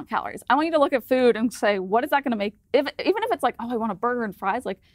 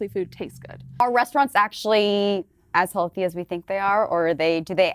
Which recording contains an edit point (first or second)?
second